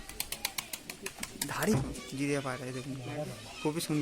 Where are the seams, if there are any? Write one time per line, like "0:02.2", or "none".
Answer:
0:01.8